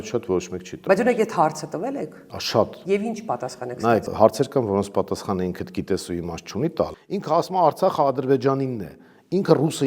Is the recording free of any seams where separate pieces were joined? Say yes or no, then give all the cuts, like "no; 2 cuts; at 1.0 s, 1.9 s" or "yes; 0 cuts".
no; 2 cuts; at 4.1 s, 7.0 s